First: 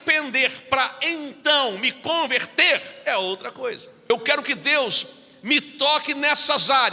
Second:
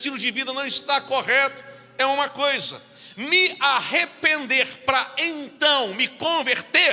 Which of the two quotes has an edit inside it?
first; 1 cut; at 4.1 s

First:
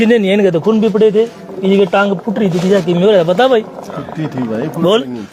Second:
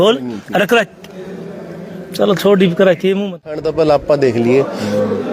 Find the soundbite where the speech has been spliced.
second; 1 cut; at 3.6 s

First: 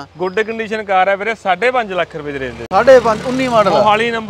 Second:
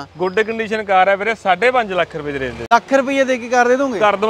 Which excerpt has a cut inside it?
second; 1 cut; at 2.6 s

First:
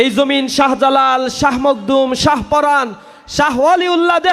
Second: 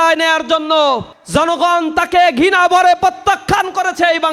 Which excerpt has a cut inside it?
second; 1 cut; at 1.1 s

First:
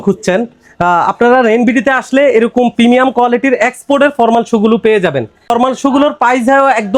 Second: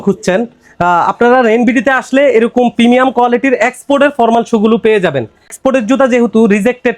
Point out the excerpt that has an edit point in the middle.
second; 1 cut; at 5.5 s

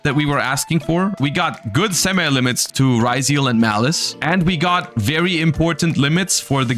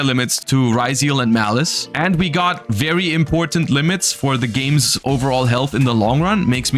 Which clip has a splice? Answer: first; 1 cut; at 1.2 s

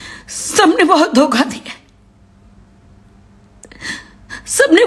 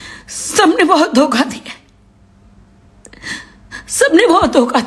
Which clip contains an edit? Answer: second; 1 cut; at 2.8 s

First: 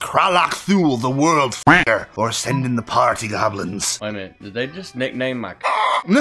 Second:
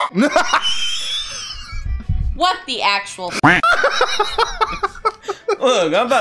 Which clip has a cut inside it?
first; 2 cuts; at 1.7 s, 3.9 s

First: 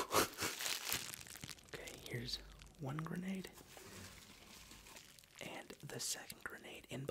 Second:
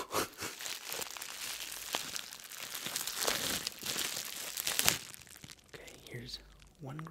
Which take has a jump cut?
first; 2 cuts; at 0.9 s, 5.0 s

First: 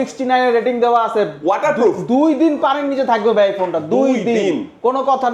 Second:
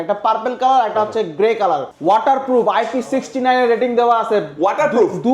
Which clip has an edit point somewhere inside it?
second; 1 cut; at 1.9 s

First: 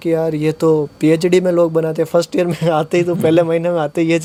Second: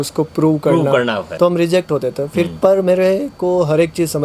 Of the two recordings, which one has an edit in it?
second; 1 cut; at 1.3 s

